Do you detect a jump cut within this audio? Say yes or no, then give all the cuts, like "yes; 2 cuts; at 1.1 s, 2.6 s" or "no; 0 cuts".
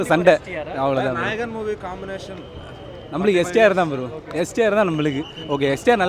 no; 0 cuts